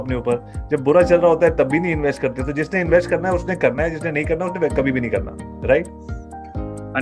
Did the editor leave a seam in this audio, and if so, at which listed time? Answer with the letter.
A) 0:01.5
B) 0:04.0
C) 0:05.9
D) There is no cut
D